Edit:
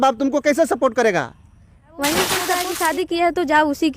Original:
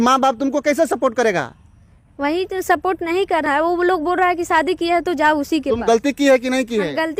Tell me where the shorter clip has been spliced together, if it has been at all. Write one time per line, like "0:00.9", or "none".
0:02.7